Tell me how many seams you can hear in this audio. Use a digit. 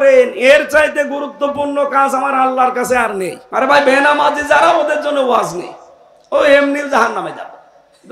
1